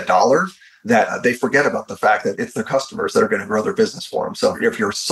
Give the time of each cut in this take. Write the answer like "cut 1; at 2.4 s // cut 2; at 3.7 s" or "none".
cut 1; at 2.4 s